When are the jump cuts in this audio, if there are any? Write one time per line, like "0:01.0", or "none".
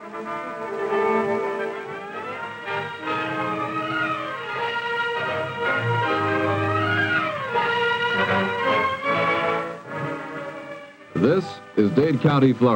0:11.9